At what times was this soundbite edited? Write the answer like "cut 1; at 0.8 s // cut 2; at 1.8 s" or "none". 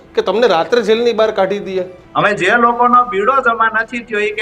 cut 1; at 2.0 s